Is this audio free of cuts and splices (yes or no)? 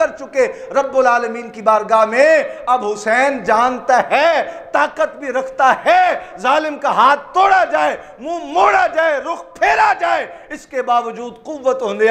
yes